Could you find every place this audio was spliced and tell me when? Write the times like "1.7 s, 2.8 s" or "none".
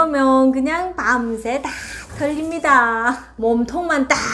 3.3 s